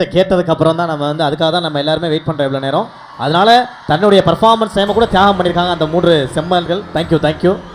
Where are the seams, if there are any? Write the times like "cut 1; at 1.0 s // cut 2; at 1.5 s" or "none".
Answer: none